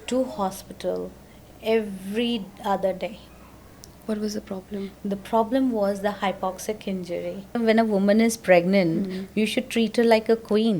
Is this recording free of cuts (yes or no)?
no